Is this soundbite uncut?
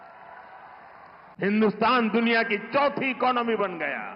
no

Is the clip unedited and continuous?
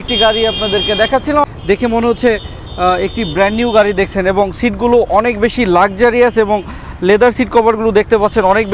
no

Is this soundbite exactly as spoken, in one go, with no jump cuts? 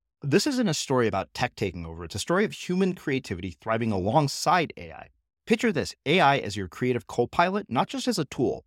yes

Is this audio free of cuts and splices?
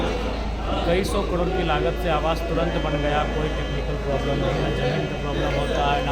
yes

